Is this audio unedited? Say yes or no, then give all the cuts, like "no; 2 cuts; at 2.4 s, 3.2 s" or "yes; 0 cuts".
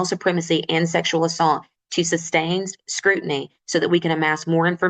yes; 0 cuts